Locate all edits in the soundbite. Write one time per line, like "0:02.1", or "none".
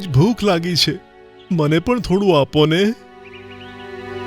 none